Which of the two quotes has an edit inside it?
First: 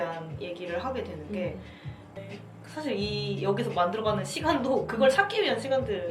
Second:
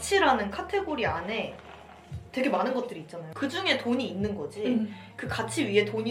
first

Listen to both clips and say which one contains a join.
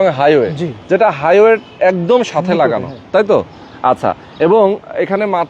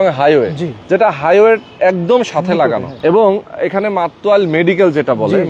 second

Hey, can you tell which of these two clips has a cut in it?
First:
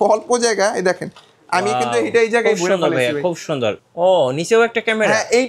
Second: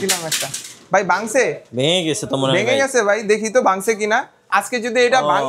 first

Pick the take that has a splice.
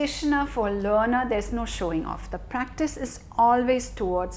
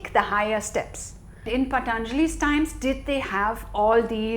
second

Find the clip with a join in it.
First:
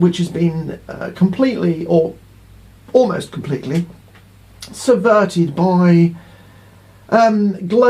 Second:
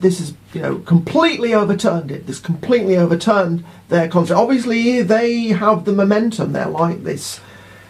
first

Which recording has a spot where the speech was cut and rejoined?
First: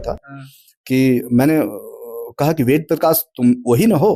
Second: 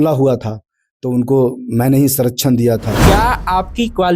second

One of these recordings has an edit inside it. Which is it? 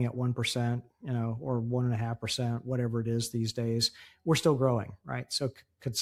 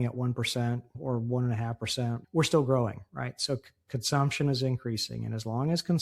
second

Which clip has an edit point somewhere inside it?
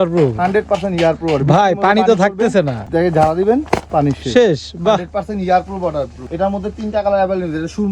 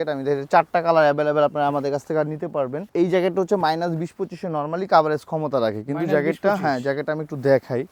first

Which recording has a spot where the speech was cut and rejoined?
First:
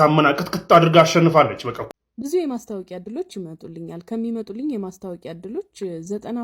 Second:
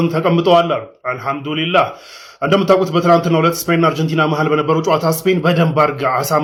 first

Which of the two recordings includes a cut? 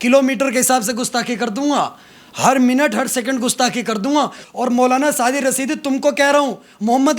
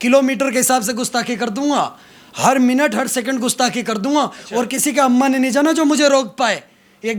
first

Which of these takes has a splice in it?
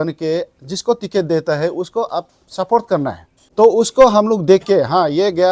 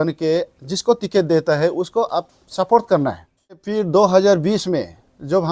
second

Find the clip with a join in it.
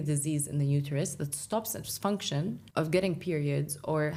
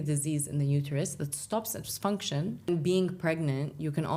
second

